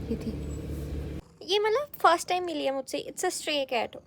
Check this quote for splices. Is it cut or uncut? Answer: cut